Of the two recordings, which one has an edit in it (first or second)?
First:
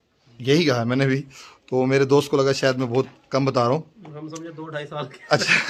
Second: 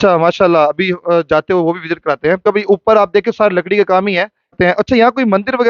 second